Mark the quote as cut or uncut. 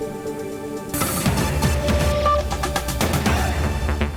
uncut